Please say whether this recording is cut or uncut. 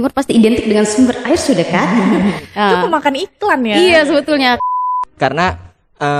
cut